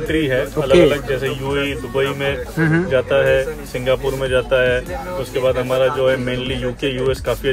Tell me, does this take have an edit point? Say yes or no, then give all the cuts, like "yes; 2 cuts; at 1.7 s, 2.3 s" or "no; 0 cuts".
no; 0 cuts